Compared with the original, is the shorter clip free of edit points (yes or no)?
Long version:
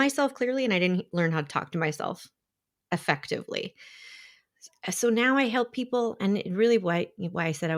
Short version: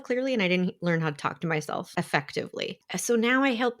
no